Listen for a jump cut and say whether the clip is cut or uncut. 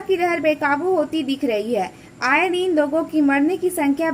uncut